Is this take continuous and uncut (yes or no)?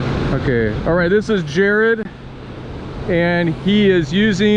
yes